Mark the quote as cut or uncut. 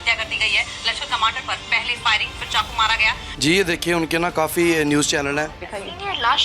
cut